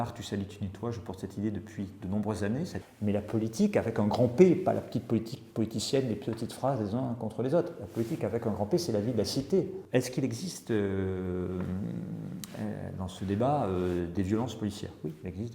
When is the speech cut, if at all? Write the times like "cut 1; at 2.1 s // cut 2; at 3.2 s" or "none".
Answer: cut 1; at 2.7 s // cut 2; at 9.8 s